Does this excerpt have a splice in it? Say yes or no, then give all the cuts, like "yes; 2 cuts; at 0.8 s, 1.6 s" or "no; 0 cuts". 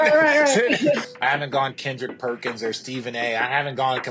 yes; 1 cut; at 1.1 s